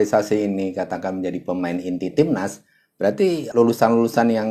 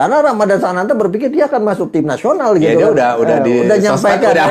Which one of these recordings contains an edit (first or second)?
first